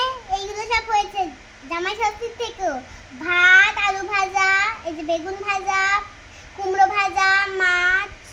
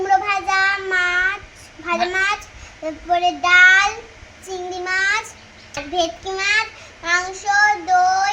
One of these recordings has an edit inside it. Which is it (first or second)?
second